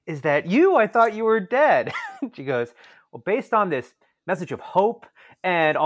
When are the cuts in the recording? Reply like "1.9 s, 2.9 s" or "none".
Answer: none